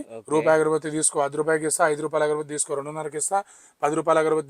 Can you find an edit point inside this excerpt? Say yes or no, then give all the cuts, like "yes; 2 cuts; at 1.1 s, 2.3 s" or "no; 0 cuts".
no; 0 cuts